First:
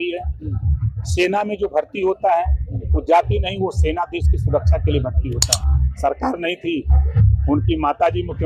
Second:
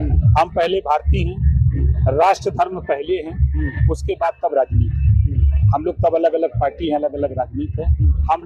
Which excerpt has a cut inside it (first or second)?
first